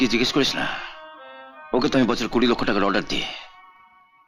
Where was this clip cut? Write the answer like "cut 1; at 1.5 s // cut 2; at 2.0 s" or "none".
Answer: none